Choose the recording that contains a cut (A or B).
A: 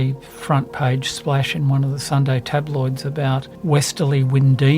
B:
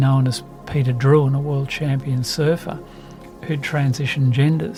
A